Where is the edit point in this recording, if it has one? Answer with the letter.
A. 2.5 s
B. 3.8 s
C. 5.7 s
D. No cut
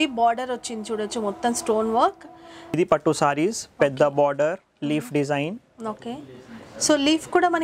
A